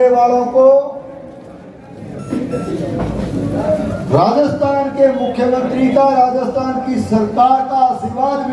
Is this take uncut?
yes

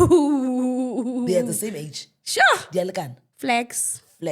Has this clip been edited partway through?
no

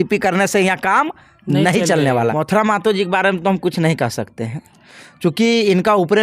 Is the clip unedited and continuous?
no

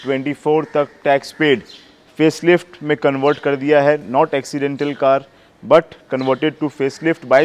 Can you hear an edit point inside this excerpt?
no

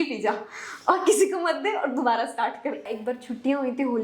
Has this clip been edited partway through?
yes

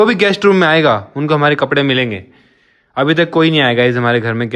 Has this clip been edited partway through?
no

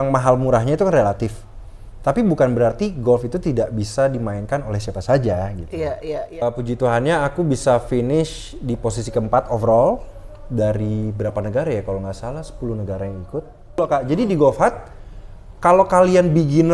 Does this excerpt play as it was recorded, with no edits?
no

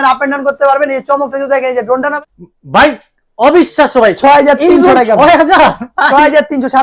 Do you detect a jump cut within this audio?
yes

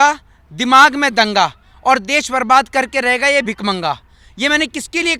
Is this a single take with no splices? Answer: yes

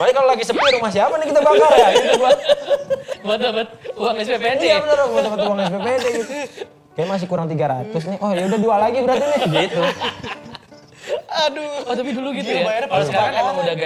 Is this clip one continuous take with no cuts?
yes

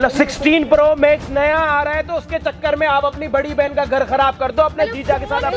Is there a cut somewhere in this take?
no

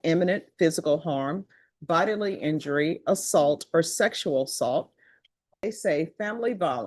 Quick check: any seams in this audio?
yes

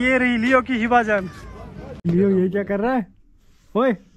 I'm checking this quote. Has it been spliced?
yes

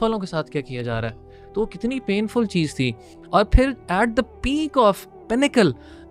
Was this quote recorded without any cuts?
yes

